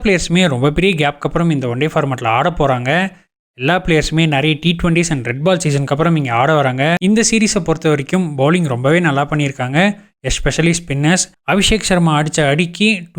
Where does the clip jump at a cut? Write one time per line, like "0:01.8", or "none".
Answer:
0:07.0
0:11.3